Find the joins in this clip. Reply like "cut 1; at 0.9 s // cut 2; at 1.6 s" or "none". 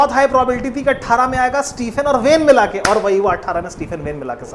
none